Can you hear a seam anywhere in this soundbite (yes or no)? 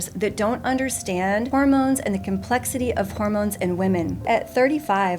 yes